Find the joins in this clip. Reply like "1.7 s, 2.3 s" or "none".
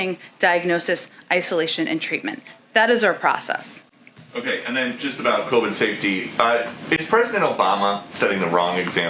none